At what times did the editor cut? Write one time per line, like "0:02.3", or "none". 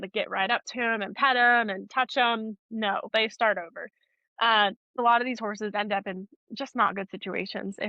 0:03.1
0:05.0